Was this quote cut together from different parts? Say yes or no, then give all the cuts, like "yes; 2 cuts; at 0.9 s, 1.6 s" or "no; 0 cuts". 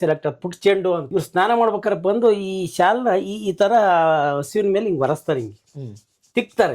yes; 1 cut; at 1.0 s